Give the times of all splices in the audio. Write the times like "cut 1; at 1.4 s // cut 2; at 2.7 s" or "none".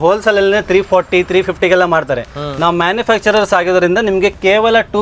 none